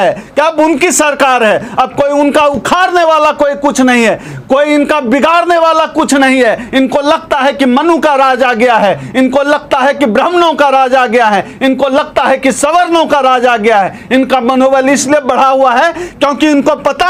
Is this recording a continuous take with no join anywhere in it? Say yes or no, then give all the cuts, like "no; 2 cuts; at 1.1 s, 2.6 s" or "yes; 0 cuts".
yes; 0 cuts